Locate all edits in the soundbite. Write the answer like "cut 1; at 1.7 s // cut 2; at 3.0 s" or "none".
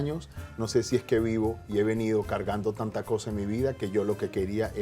none